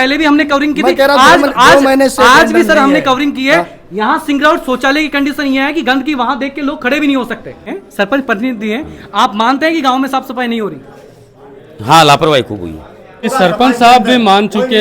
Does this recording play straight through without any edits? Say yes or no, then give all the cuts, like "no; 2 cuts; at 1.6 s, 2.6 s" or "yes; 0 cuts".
no; 2 cuts; at 7.8 s, 13.3 s